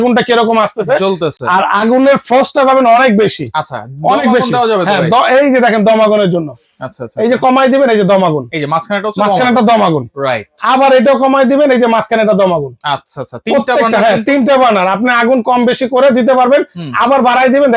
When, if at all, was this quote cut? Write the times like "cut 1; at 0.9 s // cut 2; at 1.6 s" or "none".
none